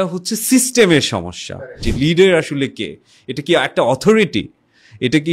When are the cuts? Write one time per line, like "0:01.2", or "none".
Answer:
0:01.6